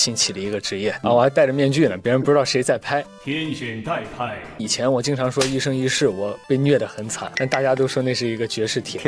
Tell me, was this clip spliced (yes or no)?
yes